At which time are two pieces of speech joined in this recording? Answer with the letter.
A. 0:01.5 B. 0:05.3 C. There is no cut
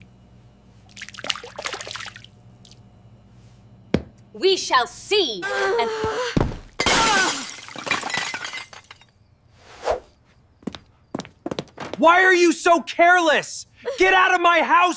B